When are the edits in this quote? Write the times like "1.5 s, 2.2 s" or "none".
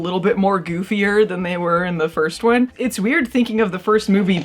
2.7 s